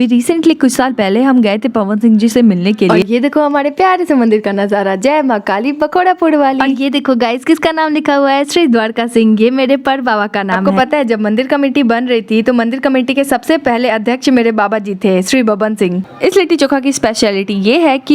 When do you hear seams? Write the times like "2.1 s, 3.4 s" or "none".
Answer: 3.0 s, 6.7 s, 10.7 s, 16.0 s